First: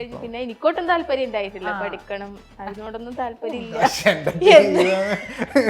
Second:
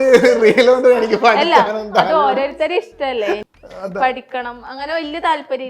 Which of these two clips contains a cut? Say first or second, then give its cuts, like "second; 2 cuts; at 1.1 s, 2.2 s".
second; 1 cut; at 3.4 s